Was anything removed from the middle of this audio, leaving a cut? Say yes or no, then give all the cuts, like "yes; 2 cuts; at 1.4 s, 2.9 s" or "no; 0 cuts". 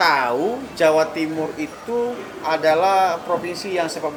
no; 0 cuts